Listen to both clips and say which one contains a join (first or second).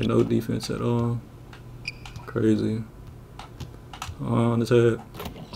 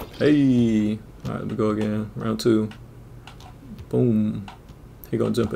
second